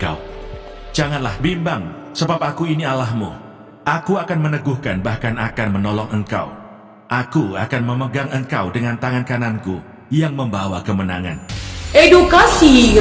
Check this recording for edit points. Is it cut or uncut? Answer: uncut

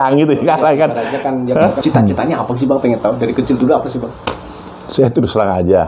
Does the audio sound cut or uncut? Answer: cut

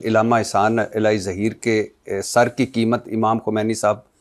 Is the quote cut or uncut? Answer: uncut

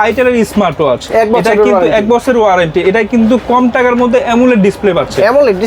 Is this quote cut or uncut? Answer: uncut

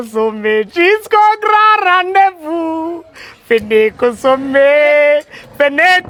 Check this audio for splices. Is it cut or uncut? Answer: uncut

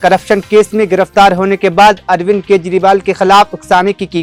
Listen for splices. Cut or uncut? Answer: uncut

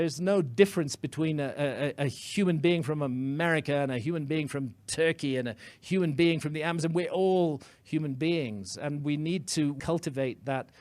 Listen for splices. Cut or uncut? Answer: cut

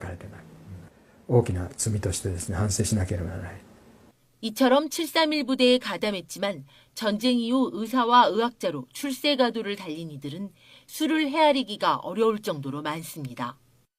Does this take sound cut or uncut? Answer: cut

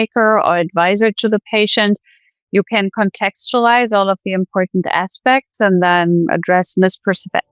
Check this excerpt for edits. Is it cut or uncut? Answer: uncut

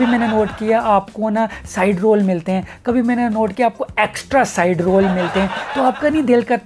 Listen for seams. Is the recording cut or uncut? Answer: uncut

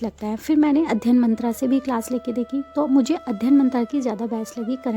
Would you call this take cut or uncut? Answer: uncut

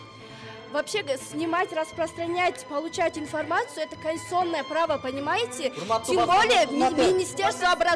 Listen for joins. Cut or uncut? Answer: uncut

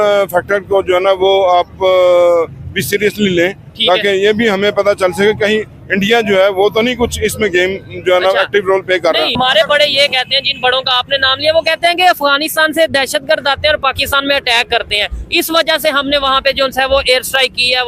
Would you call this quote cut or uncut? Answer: cut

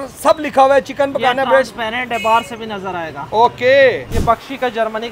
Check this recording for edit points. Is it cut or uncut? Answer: cut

